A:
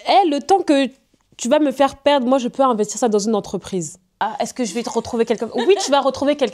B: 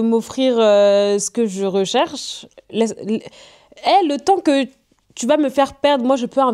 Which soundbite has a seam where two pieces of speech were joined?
A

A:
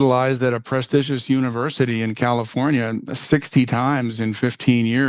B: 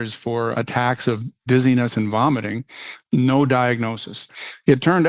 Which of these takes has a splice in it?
B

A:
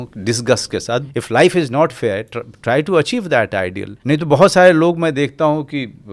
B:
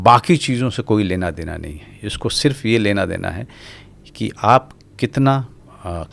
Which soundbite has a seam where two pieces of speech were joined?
A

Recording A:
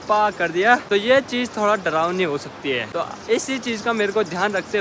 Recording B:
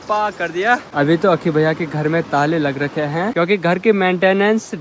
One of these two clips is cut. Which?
B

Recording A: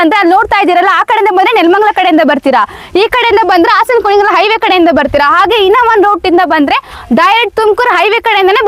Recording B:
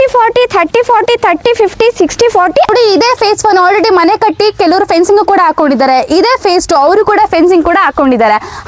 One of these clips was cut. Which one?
B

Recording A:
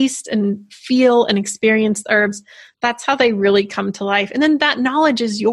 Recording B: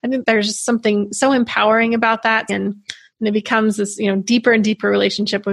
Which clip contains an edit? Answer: B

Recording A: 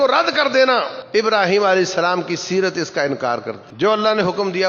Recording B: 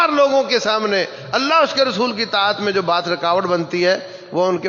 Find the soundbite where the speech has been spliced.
A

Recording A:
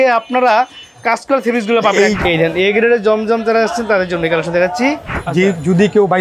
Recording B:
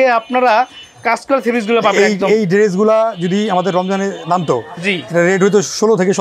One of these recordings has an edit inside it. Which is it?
A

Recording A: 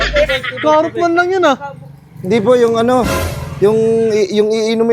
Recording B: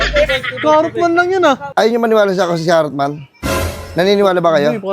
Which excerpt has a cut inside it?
B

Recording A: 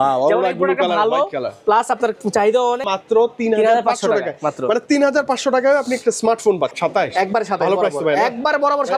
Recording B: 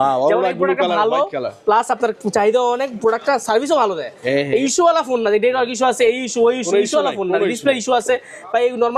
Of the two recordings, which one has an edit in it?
A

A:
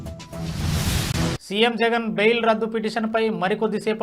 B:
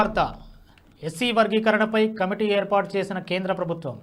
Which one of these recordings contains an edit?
A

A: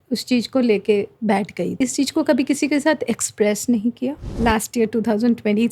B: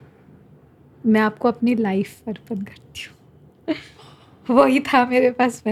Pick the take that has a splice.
A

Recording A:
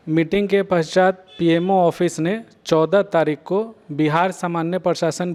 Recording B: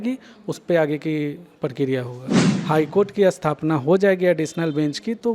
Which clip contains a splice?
B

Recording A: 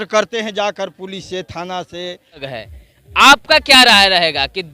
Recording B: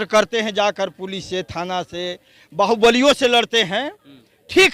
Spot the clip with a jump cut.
A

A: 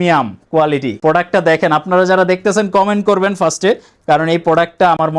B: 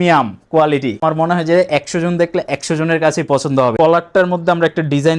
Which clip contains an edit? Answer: B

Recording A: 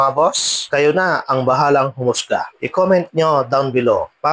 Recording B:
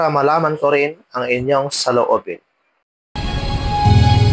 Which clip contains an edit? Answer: B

